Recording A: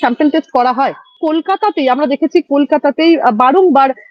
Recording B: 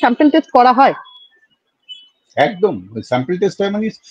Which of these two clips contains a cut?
A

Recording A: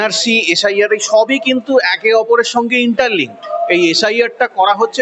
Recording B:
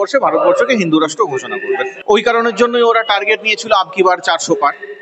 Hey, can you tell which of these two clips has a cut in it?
B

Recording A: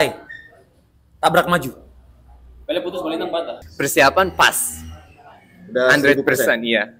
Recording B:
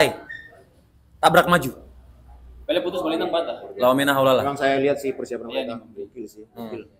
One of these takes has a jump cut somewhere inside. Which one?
A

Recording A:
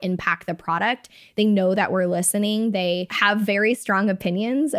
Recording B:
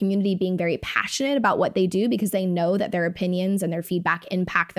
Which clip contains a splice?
A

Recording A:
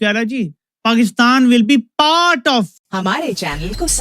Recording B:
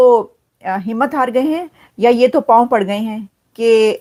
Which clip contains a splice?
A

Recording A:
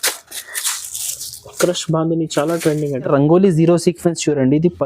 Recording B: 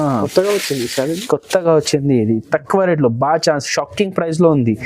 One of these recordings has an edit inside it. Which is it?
A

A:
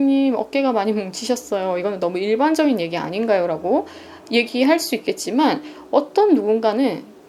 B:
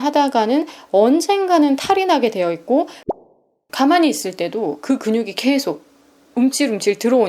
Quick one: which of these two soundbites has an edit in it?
B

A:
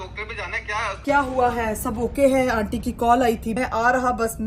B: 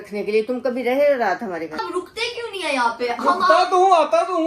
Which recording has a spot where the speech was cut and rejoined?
A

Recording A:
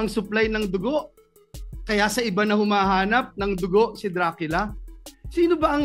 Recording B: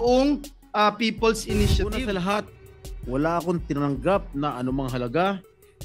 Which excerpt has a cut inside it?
B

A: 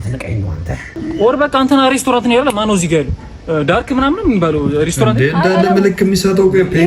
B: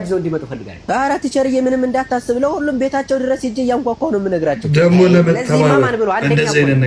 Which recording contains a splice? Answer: A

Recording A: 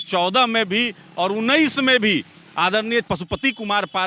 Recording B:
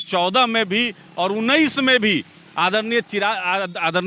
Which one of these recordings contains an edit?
A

